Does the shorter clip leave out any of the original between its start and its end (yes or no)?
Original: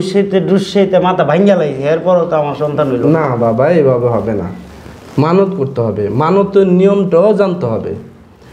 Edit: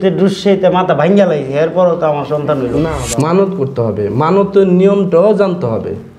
yes